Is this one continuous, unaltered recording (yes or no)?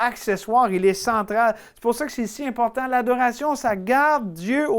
yes